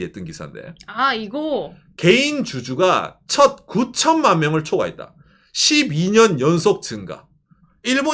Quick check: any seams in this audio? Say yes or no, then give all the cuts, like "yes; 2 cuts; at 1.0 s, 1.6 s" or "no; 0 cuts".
no; 0 cuts